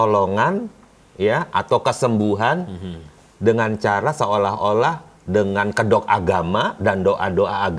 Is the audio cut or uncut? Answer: uncut